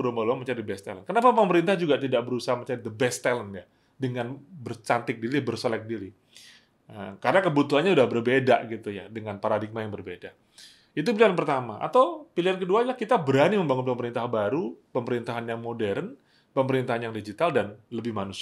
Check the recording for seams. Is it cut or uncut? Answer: uncut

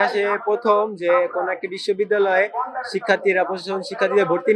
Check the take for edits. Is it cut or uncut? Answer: uncut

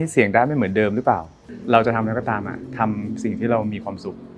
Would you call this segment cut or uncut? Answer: cut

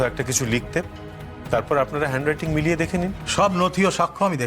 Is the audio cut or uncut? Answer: cut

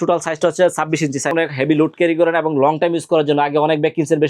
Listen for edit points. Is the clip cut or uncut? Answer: cut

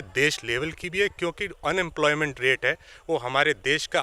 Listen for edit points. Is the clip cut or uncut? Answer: uncut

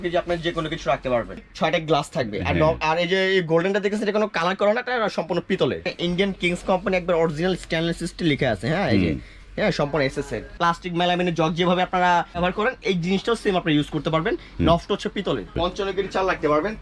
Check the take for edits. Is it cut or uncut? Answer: cut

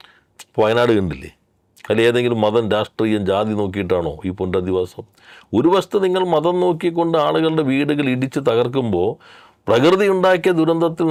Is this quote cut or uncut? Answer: uncut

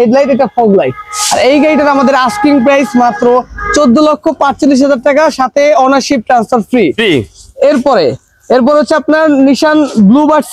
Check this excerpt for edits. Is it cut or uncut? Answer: uncut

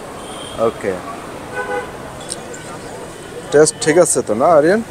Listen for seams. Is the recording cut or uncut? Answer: cut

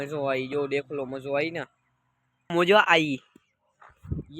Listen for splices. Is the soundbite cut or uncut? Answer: cut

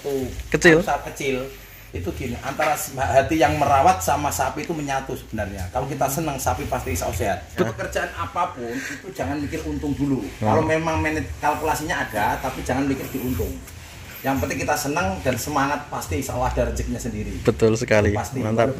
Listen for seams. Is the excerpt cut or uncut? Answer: cut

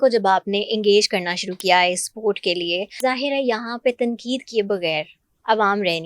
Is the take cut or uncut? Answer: cut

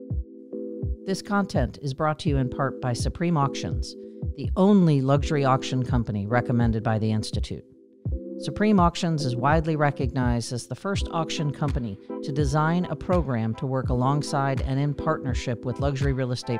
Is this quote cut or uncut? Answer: cut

